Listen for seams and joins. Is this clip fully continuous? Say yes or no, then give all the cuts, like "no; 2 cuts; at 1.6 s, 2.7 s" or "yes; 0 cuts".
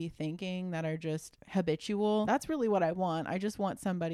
no; 2 cuts; at 1.4 s, 2.3 s